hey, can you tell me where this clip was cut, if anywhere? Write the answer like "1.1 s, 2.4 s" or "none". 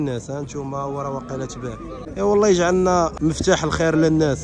2.0 s, 3.1 s